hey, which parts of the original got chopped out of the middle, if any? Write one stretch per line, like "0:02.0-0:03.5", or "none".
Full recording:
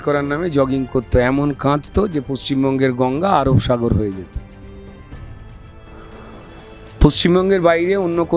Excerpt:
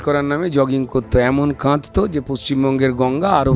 none

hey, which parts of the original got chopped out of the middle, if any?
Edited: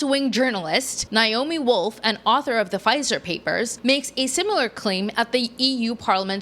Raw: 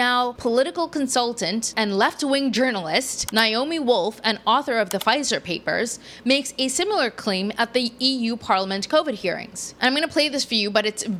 0:05.9-0:06.2

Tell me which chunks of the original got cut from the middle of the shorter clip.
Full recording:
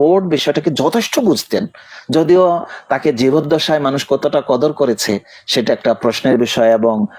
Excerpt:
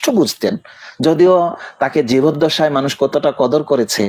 none

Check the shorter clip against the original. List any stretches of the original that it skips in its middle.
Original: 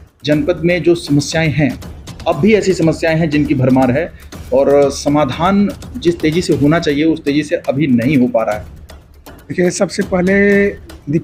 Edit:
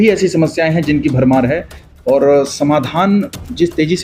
none

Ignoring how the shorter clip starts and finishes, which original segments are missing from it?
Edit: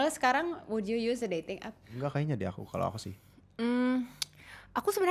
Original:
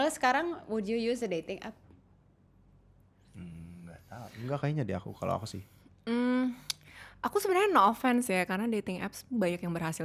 0:01.8-0:04.3

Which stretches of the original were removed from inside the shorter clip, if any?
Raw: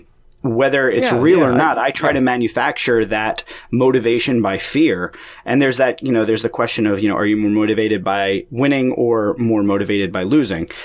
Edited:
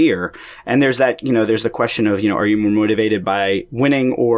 none

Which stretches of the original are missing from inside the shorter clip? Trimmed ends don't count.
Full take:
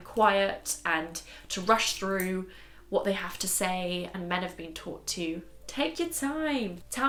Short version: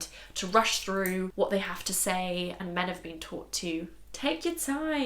0:02.4-0:02.8

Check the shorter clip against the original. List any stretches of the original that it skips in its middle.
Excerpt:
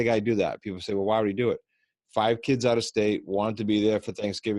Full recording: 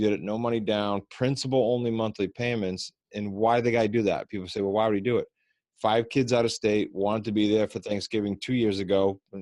none

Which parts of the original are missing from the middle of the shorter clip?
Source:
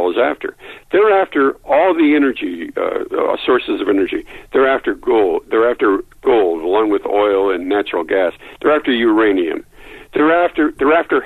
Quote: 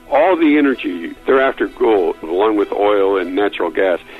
0:02.7-0:04.3
0:05.5-0:06.6

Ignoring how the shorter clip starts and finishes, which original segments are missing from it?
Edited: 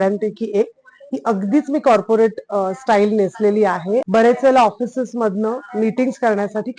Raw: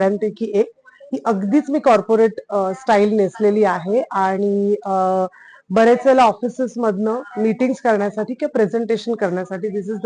0:04.1-0:05.7

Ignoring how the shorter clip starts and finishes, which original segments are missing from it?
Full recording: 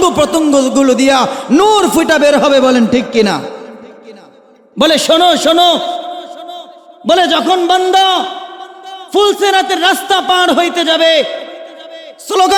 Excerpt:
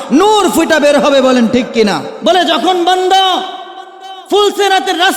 0:03.5-0:06.9

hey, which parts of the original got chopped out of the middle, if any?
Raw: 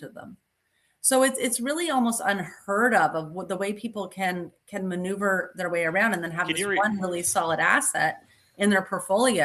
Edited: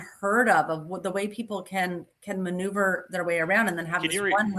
none

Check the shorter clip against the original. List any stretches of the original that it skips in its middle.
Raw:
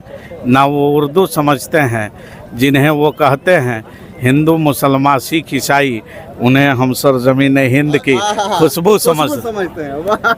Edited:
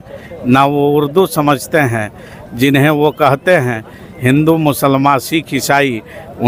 none

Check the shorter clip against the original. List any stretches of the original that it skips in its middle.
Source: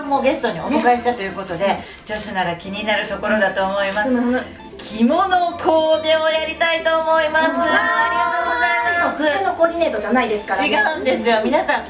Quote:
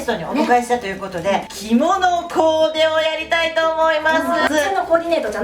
0:01.9-0:04.8
0:07.8-0:09.2

